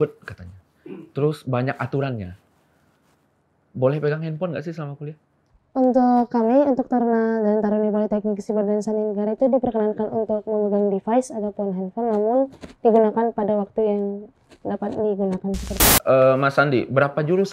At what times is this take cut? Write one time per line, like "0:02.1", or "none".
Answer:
0:15.9